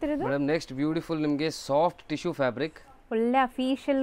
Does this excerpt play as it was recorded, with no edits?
yes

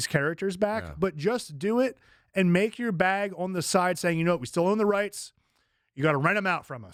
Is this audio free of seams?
yes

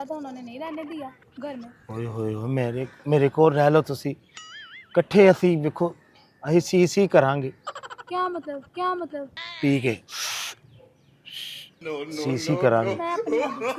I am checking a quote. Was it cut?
no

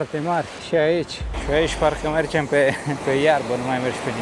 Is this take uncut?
no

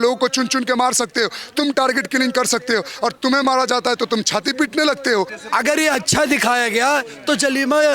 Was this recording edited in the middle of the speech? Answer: yes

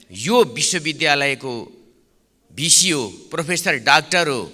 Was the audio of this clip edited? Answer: no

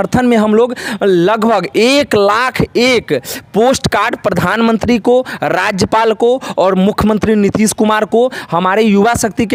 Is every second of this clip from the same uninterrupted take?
yes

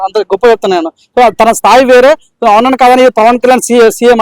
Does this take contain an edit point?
no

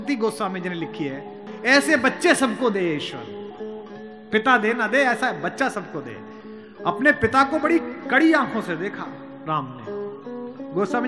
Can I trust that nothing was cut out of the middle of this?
no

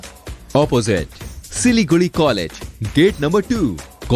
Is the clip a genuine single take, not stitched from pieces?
yes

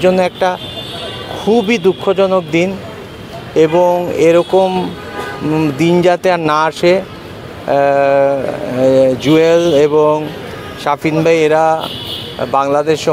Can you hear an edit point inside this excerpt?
no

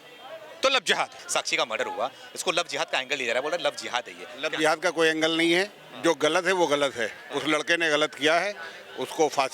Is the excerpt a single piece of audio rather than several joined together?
no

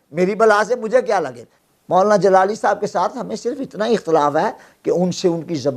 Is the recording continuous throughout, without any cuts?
no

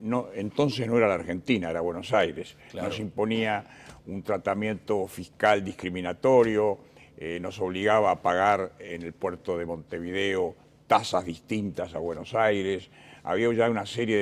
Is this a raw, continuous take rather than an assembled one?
no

